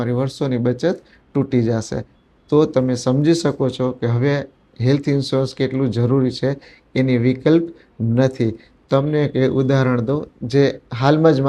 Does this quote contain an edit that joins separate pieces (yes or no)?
no